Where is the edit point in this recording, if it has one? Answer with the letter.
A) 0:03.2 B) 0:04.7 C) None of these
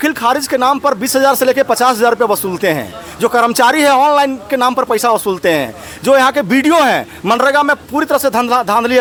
C